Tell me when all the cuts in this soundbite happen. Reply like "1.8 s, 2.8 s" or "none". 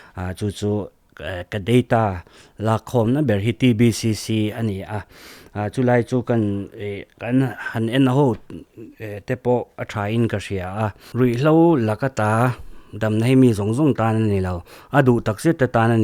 11.0 s